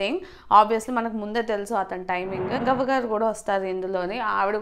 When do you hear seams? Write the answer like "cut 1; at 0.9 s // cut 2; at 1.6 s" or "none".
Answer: cut 1; at 2.6 s